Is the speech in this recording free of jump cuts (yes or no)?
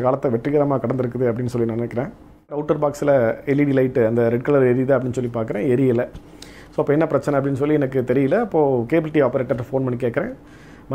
no